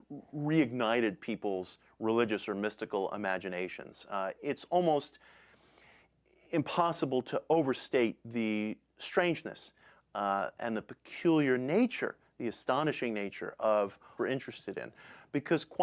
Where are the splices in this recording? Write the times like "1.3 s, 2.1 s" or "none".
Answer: none